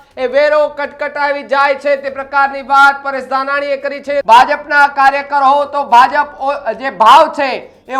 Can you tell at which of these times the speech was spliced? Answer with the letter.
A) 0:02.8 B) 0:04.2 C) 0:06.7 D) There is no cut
B